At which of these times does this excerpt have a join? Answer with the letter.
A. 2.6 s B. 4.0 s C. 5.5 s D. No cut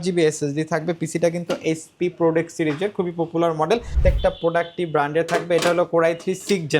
B